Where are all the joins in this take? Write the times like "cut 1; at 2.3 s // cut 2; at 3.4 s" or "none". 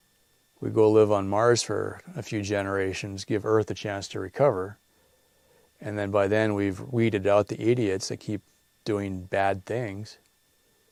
none